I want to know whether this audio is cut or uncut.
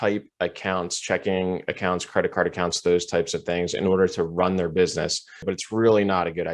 cut